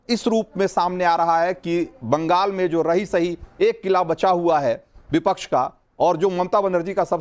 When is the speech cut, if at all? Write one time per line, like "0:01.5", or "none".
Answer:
none

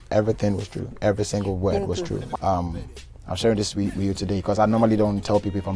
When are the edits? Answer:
0:02.4

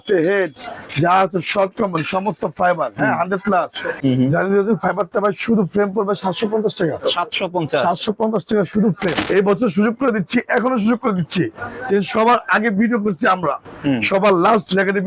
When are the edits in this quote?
0:04.0
0:09.2

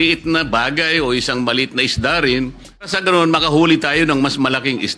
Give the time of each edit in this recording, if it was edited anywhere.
0:02.9

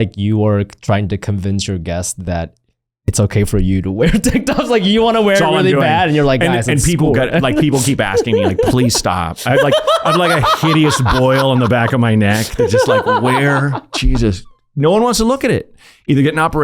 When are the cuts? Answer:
0:03.1

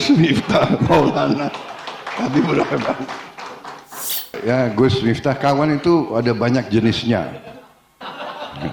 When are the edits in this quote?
0:04.3

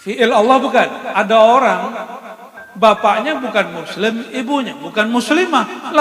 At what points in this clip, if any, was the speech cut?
0:01.0

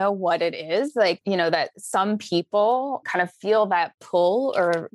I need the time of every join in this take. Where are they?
0:01.2
0:03.0

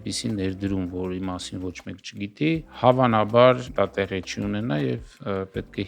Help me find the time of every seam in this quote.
0:03.7

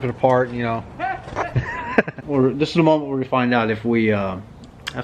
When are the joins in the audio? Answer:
0:02.2

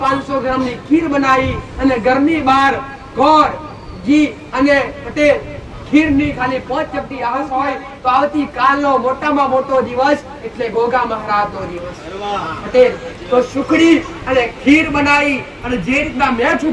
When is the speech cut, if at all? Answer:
0:07.4

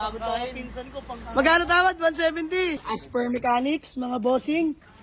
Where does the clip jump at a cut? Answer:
0:03.0

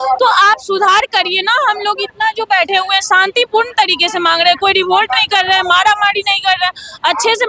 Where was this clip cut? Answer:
none

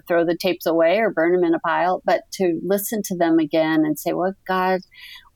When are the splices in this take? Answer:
none

